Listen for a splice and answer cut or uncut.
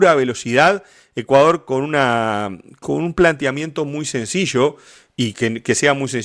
uncut